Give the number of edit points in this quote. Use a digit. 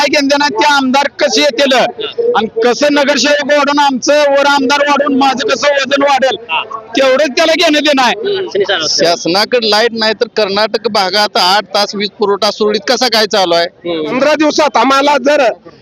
2